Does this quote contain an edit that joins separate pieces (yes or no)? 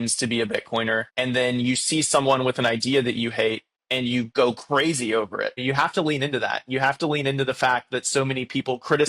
yes